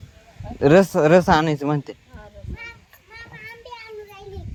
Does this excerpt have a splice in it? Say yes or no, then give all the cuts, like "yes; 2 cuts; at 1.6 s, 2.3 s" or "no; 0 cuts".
no; 0 cuts